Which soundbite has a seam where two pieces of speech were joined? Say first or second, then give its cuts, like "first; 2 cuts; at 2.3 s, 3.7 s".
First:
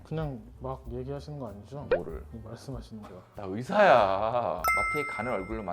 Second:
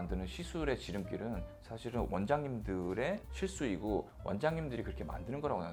first; 1 cut; at 4.7 s